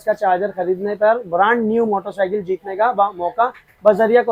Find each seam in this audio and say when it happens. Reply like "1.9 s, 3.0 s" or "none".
none